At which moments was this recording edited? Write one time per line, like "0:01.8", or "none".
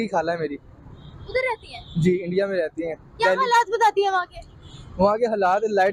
none